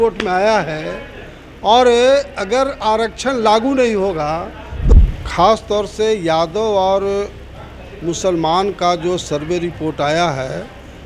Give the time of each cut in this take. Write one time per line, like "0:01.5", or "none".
0:04.9